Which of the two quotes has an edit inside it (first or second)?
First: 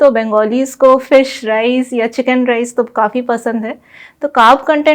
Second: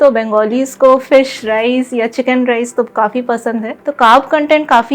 second